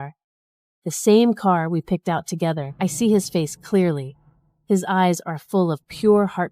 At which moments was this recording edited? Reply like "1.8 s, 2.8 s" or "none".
2.7 s